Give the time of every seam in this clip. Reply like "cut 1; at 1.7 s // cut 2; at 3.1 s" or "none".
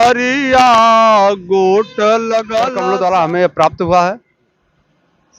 cut 1; at 2.8 s